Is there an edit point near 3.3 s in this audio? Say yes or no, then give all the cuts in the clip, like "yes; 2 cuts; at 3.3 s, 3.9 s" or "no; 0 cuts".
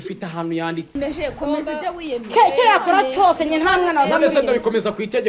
no; 1 cut; at 1.0 s